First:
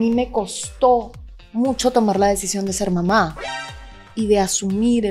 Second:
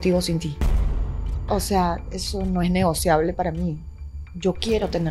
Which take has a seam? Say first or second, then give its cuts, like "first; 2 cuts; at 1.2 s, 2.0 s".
second; 1 cut; at 1.2 s